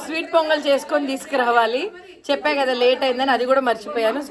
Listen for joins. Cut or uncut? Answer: uncut